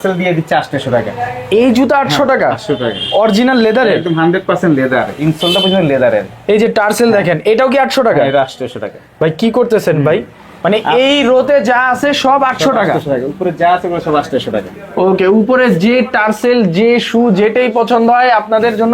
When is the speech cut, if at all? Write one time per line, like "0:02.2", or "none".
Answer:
none